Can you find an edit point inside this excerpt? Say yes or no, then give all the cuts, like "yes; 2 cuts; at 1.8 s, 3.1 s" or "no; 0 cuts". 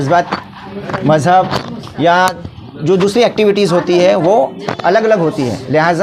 no; 0 cuts